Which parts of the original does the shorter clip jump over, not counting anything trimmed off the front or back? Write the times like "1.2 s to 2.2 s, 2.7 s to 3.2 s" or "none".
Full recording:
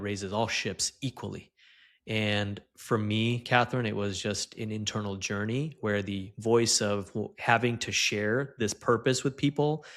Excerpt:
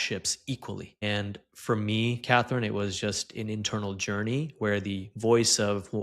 1.6 s to 2.2 s